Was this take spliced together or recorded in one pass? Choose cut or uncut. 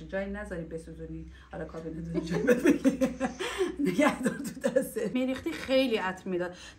cut